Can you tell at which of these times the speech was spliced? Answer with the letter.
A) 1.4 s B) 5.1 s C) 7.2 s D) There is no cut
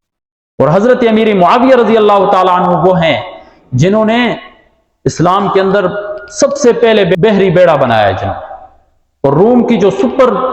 C